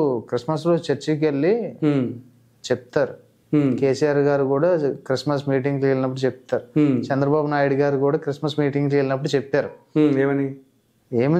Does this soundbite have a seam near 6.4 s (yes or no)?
no